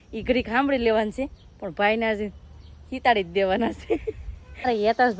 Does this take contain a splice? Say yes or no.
no